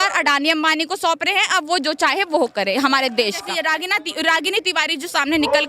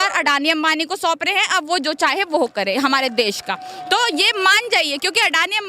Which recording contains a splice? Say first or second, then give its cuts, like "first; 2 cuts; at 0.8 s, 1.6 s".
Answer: first; 1 cut; at 3.5 s